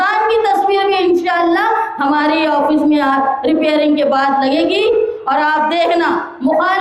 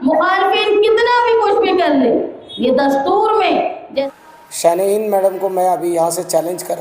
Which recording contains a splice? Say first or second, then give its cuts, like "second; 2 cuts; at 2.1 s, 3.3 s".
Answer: second; 1 cut; at 4.0 s